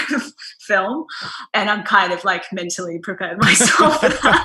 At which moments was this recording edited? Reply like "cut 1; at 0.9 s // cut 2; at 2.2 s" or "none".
none